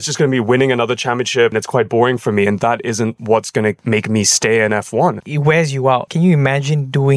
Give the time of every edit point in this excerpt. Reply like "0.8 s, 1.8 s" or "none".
1.5 s, 5.3 s, 6.1 s